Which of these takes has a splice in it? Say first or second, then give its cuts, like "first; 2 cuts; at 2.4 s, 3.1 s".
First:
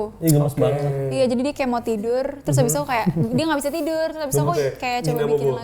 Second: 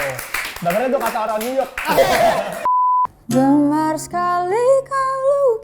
second; 1 cut; at 2.7 s